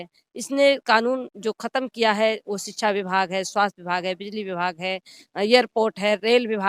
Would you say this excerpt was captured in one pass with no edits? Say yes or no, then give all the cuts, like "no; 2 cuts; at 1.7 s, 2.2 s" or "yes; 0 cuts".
yes; 0 cuts